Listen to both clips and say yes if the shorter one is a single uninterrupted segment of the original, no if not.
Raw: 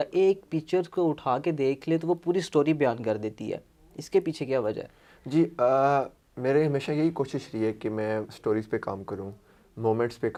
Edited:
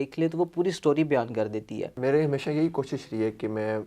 no